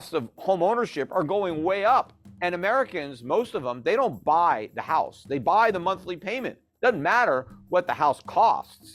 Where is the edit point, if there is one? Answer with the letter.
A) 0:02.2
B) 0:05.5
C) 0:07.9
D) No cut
A